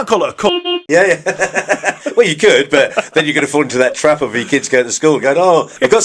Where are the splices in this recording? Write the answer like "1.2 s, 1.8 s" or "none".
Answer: none